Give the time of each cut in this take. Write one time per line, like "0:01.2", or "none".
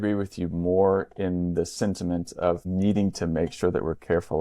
0:02.6